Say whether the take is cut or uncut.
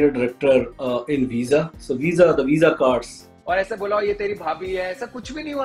cut